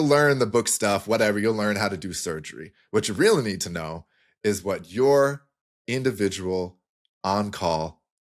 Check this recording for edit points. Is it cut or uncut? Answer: uncut